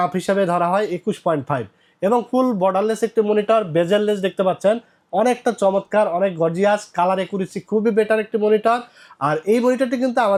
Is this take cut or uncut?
uncut